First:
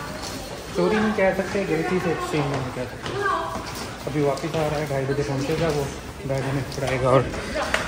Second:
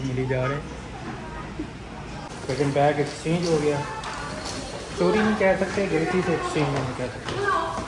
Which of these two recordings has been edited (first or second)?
second